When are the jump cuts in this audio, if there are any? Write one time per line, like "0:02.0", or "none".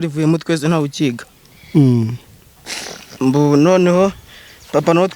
none